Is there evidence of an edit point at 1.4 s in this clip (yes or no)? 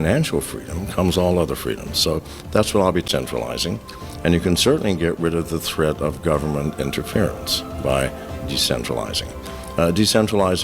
no